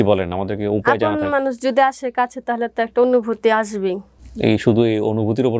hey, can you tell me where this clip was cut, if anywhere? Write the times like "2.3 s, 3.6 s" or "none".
none